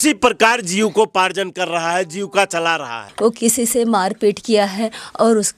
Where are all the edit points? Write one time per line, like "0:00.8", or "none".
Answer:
0:03.1